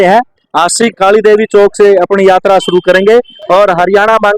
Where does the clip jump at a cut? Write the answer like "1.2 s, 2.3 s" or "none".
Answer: 3.4 s